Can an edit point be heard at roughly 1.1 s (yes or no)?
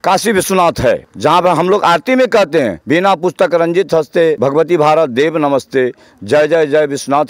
yes